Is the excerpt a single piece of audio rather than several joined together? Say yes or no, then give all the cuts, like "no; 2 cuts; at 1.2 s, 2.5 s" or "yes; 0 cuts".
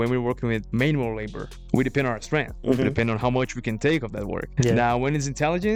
yes; 0 cuts